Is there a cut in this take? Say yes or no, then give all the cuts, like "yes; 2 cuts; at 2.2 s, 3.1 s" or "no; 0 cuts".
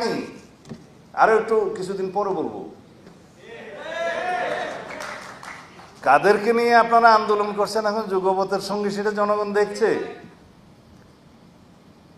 no; 0 cuts